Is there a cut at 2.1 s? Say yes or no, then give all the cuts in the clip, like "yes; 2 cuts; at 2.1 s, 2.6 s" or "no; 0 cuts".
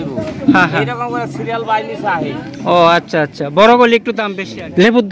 no; 1 cut; at 4.1 s